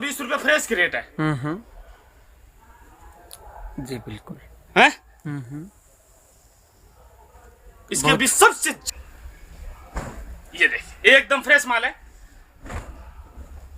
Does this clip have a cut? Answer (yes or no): yes